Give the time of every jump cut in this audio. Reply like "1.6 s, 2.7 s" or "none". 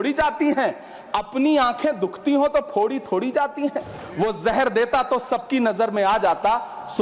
4.0 s